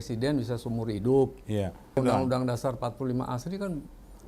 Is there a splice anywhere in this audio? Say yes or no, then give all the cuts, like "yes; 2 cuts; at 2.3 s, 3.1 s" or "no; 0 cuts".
yes; 1 cut; at 1.9 s